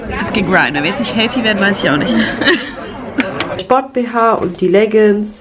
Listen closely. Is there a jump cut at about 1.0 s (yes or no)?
no